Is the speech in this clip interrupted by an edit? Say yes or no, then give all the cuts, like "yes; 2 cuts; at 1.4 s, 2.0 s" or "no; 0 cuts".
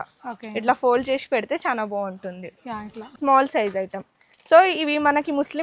yes; 1 cut; at 3.0 s